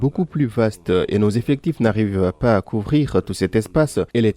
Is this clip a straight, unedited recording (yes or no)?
yes